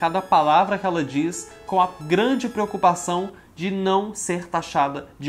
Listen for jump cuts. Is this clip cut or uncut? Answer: uncut